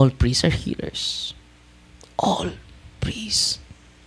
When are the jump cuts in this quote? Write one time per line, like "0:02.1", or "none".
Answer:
none